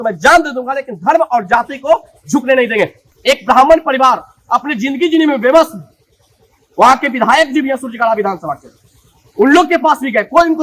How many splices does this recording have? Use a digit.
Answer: 1